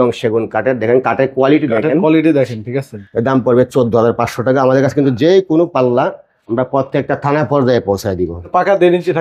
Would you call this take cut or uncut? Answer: cut